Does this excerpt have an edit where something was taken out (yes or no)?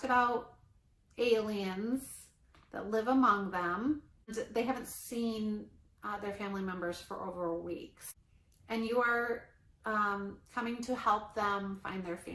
yes